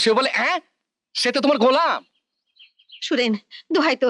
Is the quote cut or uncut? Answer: uncut